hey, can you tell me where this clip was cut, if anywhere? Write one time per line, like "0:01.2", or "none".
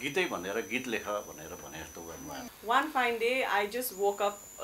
0:02.4